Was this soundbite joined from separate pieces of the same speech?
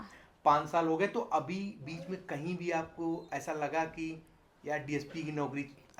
no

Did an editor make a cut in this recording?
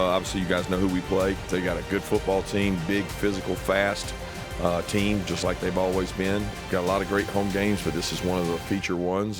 yes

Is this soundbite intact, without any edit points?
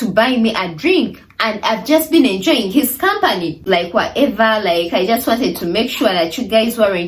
no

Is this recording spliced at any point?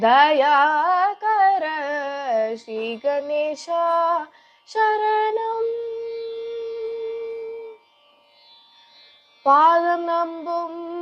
no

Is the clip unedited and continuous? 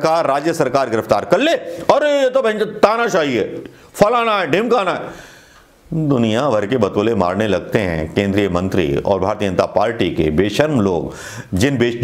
yes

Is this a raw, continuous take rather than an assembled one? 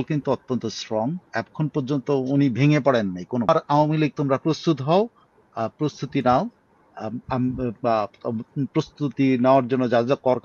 no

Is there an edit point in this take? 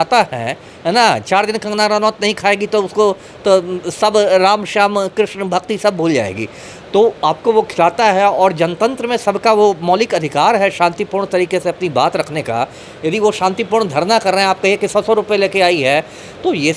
no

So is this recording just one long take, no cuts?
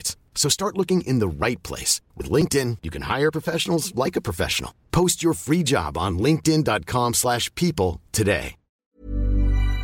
no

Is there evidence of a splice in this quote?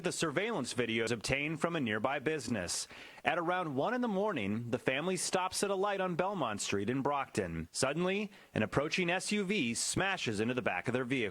yes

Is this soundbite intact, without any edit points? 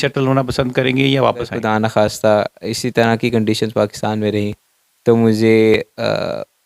no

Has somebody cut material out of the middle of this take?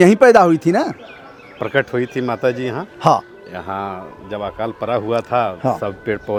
no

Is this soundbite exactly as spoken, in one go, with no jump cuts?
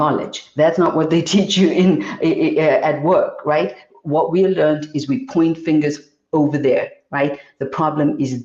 yes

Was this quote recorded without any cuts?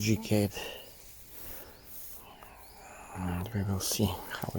yes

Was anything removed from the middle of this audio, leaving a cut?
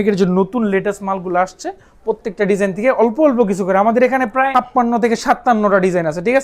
yes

